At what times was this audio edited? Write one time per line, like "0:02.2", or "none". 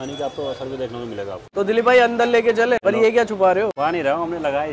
0:01.4
0:02.8
0:03.7